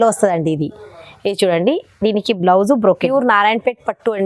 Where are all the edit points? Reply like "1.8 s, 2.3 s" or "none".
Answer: 3.1 s